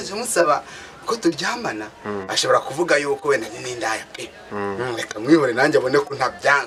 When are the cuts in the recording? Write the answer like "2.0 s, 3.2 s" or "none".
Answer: none

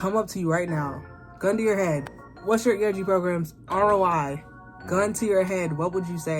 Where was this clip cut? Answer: none

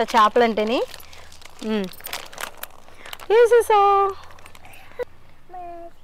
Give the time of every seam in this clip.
4.9 s

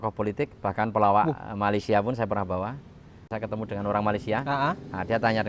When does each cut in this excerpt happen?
3.3 s

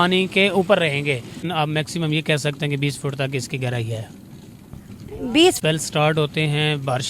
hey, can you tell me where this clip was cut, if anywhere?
1.4 s, 5.6 s

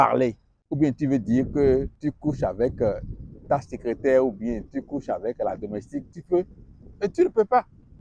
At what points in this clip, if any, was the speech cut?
1.9 s

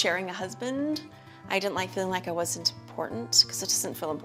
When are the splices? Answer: none

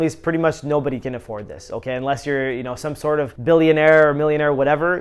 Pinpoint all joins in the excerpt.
none

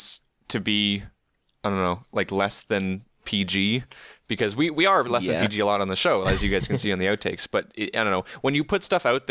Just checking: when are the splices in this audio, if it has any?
none

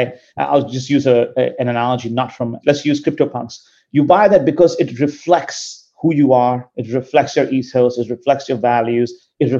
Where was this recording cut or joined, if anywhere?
2.6 s

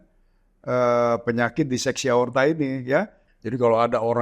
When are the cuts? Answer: 3.3 s

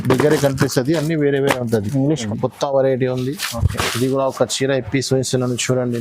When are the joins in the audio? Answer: 2.3 s

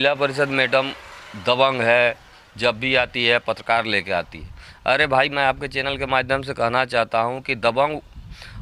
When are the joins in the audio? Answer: none

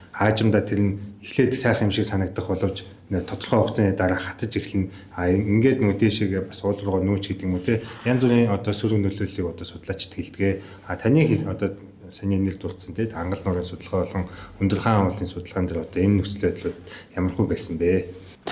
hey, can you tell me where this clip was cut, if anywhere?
none

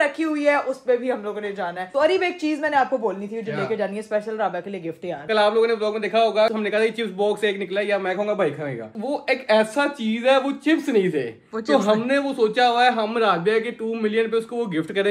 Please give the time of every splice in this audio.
1.9 s, 5.2 s, 6.5 s, 8.8 s

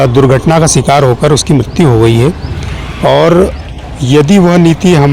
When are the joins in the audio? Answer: none

